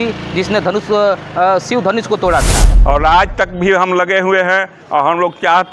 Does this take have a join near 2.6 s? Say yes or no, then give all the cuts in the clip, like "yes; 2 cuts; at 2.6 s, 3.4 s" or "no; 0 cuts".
yes; 1 cut; at 2.6 s